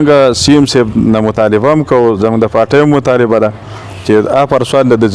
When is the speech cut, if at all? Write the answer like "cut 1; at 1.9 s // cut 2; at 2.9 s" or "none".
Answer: none